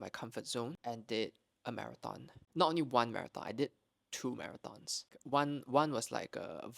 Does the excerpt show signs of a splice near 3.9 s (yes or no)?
no